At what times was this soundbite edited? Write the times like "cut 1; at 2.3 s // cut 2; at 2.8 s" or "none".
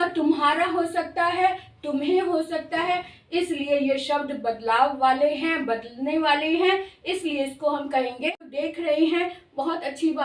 cut 1; at 8.5 s